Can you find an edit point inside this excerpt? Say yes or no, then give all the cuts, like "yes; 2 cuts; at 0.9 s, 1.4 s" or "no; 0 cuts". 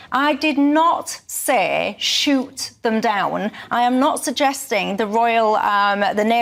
no; 0 cuts